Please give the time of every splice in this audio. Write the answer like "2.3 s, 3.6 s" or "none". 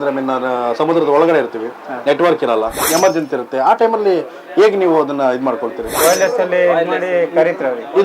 2.8 s, 5.9 s